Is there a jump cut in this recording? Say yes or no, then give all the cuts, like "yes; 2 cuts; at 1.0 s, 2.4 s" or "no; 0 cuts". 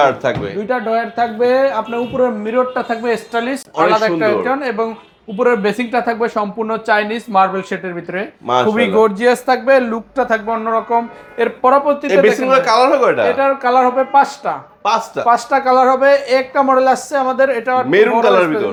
no; 0 cuts